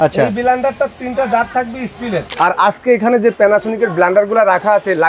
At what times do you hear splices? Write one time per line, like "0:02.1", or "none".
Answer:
0:02.3